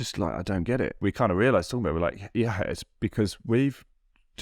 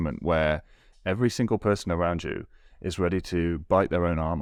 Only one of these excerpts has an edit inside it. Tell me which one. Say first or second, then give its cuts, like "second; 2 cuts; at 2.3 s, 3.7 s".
first; 1 cut; at 1.0 s